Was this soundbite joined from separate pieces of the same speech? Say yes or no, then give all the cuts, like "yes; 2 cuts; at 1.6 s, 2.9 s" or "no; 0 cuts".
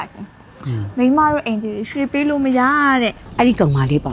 yes; 1 cut; at 3.2 s